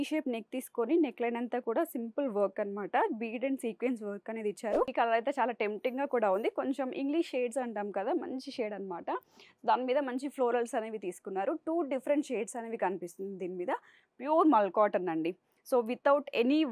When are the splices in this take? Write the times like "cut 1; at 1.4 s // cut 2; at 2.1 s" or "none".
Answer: cut 1; at 4.9 s